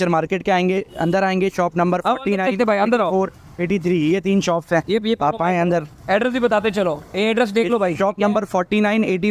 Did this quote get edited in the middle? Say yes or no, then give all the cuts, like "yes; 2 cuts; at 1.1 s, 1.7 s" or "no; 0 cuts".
no; 0 cuts